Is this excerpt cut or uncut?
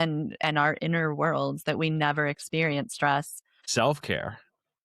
cut